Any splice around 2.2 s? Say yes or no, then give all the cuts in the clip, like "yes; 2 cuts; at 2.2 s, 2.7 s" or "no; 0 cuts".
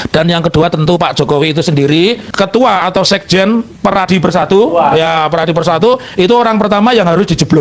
yes; 1 cut; at 2.2 s